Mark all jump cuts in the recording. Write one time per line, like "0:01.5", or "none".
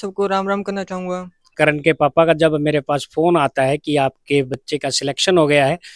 0:01.5